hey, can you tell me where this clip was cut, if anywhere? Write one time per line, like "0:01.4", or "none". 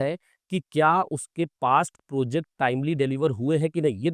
none